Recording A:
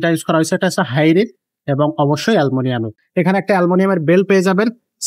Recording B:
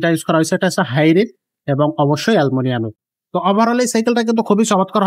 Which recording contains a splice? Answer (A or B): A